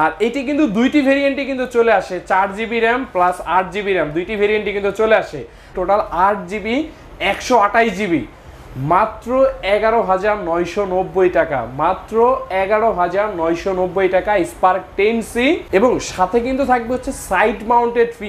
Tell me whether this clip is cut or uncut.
cut